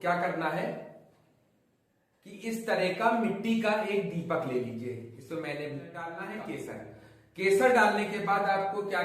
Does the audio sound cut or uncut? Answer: cut